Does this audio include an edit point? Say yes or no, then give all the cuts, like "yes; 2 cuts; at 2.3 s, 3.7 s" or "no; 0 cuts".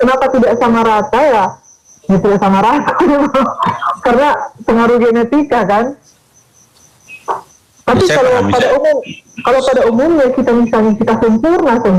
no; 0 cuts